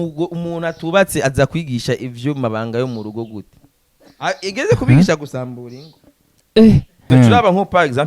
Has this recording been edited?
yes; 1 cut; at 6.9 s

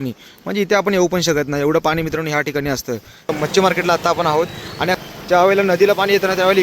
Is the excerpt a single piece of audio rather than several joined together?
no; 2 cuts; at 3.3 s, 5.0 s

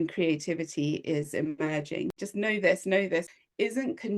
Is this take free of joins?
no; 2 cuts; at 2.1 s, 3.3 s

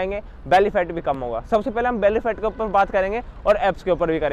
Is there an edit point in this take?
no; 0 cuts

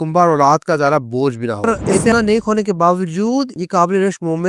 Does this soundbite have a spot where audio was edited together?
yes; 1 cut; at 1.9 s

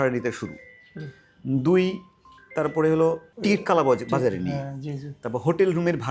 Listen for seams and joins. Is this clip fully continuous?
yes; 0 cuts

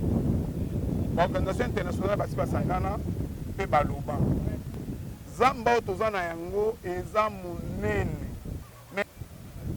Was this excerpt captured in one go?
no; 2 cuts; at 4.7 s, 8.8 s

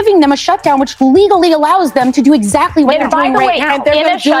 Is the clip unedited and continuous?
yes; 0 cuts

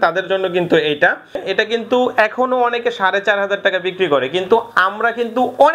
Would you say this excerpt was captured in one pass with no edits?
no; 1 cut; at 1.4 s

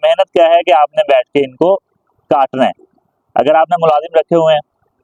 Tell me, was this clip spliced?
no; 0 cuts

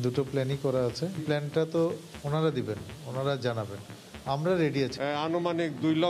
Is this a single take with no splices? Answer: no; 2 cuts; at 1.2 s, 4.9 s

